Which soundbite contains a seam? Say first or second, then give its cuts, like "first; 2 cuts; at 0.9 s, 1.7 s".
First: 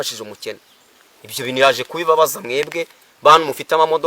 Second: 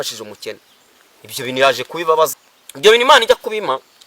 second; 1 cut; at 2.4 s